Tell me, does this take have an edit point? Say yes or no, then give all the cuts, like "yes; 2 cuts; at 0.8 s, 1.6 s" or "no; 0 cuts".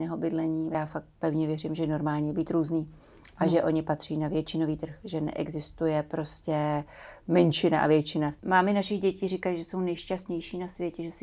yes; 3 cuts; at 0.7 s, 8.3 s, 10.0 s